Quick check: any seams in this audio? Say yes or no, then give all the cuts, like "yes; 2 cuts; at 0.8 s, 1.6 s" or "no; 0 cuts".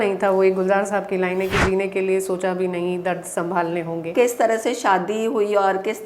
yes; 1 cut; at 4.1 s